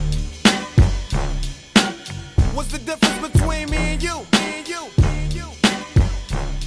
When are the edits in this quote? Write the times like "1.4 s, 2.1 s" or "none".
2.3 s